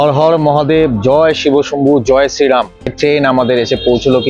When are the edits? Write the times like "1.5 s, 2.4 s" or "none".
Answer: 2.9 s